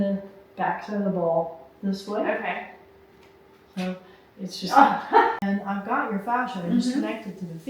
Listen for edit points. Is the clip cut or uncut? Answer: cut